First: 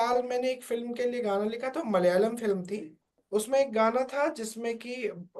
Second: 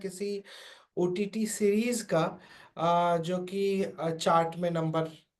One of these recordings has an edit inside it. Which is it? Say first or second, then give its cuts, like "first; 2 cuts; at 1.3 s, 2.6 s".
first; 1 cut; at 3.2 s